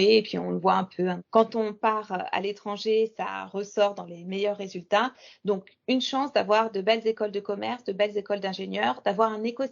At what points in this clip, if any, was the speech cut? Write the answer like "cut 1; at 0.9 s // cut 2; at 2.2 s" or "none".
cut 1; at 1.2 s